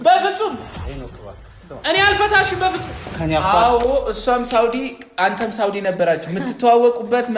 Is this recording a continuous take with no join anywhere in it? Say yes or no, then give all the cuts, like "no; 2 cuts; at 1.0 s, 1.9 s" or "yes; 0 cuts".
no; 1 cut; at 3.1 s